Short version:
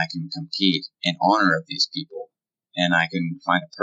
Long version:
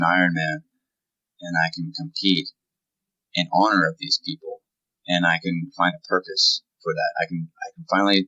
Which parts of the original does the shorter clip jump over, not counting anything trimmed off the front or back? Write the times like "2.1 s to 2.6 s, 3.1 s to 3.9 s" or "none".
2.5 s to 3.2 s